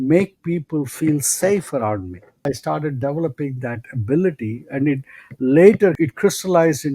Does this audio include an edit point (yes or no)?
yes